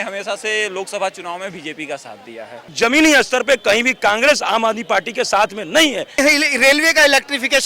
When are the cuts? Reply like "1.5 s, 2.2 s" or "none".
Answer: 2.7 s, 6.1 s